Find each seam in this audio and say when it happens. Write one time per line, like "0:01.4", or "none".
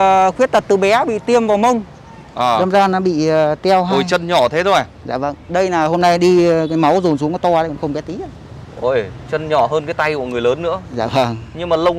none